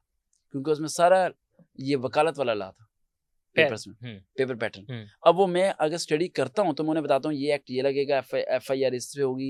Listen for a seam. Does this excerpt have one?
no; 0 cuts

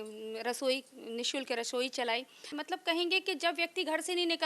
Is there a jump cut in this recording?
yes; 1 cut; at 2.6 s

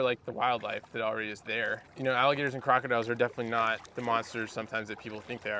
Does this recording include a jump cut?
yes; 2 cuts; at 1.8 s, 3.9 s

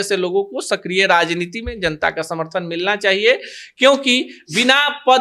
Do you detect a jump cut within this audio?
no; 0 cuts

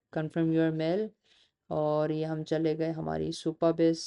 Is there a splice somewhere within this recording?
no; 0 cuts

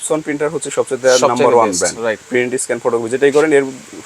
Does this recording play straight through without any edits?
no; 1 cut; at 2.2 s

